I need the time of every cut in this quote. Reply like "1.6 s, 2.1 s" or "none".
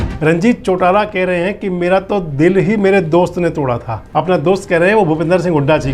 3.9 s